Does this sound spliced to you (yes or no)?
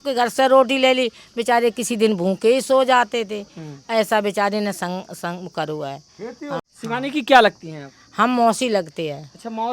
yes